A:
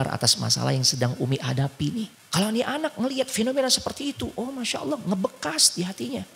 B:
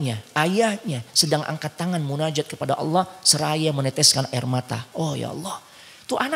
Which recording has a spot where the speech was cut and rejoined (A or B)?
A